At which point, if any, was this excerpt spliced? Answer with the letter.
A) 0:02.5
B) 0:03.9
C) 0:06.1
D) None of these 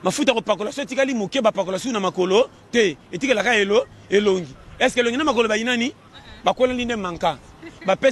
D